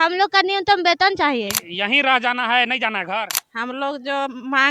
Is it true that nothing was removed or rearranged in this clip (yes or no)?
no